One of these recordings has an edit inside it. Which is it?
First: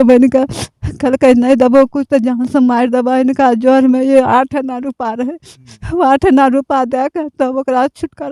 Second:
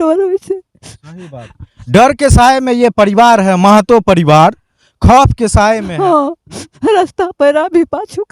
second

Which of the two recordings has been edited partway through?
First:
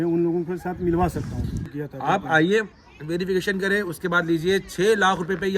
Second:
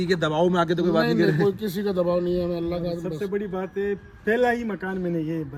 first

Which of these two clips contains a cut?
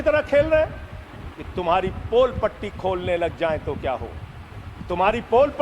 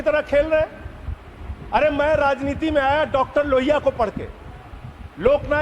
first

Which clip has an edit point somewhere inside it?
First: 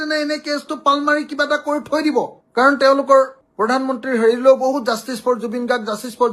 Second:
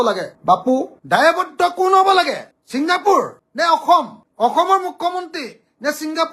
second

